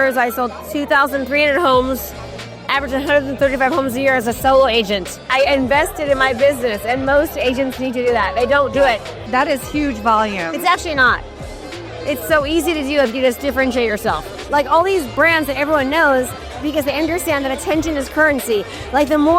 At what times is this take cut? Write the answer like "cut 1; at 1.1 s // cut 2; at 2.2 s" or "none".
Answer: cut 1; at 5.2 s // cut 2; at 9.1 s // cut 3; at 14.4 s